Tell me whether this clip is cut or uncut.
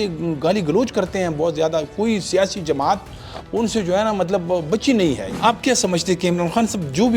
cut